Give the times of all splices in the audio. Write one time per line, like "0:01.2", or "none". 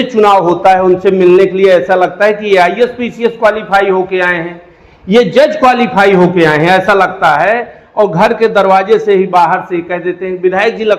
none